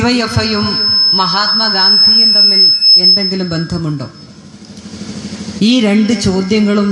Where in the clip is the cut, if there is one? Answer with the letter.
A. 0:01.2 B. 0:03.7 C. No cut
B